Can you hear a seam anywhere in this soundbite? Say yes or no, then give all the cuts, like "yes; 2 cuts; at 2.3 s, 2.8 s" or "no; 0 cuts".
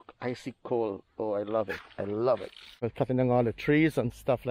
yes; 1 cut; at 2.7 s